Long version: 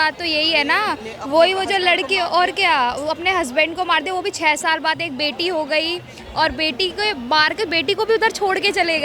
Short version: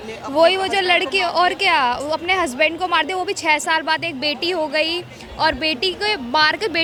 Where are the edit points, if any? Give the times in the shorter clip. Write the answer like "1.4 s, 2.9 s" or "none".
none